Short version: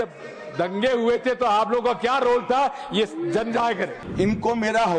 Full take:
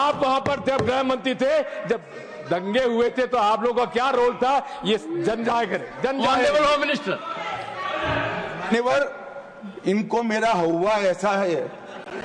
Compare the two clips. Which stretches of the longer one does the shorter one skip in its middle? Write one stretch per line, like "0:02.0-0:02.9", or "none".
0:05.9-0:09.6